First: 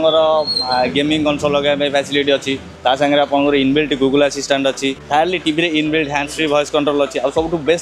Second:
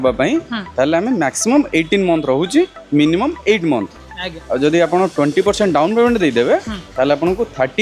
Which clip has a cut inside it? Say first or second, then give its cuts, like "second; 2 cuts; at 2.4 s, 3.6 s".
first; 2 cuts; at 2.7 s, 5.0 s